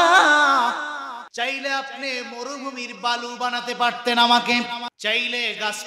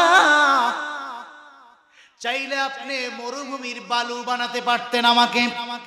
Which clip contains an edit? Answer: first; 2 cuts; at 1.2 s, 4.9 s

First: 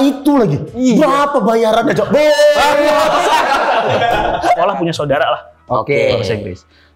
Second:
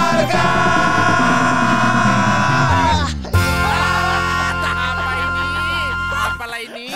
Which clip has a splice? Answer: first; 1 cut; at 4.6 s

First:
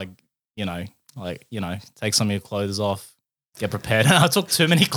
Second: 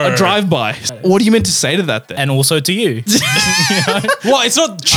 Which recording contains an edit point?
second; 2 cuts; at 0.9 s, 2.1 s

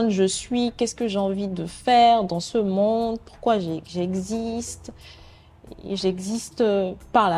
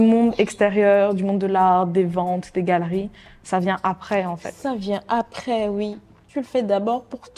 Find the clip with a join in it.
second; 1 cut; at 6.1 s

